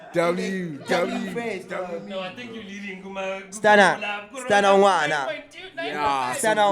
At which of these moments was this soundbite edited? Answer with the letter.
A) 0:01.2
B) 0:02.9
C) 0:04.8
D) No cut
D